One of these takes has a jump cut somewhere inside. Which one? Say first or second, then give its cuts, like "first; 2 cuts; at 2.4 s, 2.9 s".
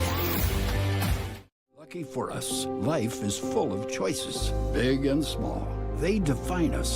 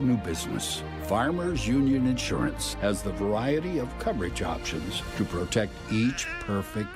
first; 1 cut; at 2.2 s